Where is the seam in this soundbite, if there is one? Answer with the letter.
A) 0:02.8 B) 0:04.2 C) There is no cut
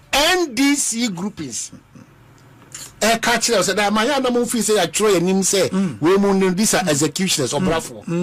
C